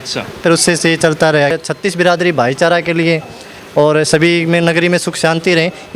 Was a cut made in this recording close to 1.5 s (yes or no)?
yes